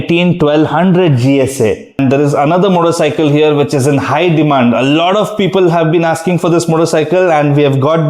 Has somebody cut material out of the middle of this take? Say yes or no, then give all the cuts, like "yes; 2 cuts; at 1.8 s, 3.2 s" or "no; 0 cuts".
yes; 1 cut; at 2.0 s